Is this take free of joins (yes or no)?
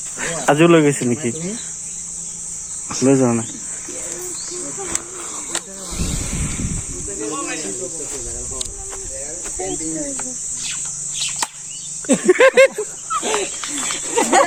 yes